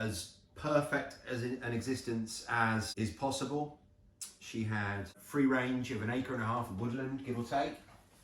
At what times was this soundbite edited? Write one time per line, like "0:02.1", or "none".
0:02.9
0:05.2